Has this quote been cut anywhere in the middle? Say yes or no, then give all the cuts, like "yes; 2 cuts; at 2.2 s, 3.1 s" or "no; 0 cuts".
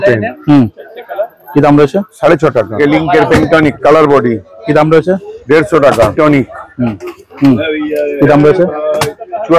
yes; 2 cuts; at 2.7 s, 6.1 s